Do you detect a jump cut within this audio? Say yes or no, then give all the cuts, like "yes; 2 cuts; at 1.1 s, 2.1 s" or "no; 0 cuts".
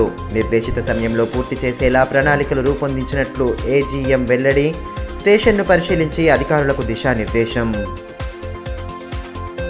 no; 0 cuts